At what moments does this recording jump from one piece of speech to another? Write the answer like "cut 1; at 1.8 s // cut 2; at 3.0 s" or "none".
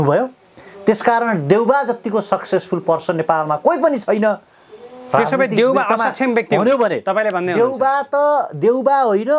none